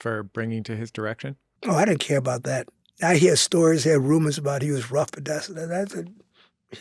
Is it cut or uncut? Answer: cut